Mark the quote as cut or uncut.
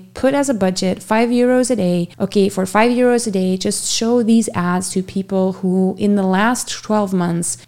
uncut